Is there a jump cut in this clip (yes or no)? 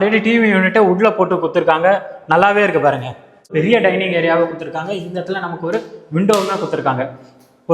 yes